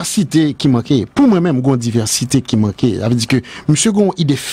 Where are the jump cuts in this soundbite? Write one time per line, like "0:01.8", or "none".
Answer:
none